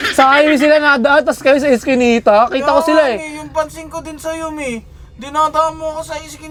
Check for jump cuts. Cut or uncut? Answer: uncut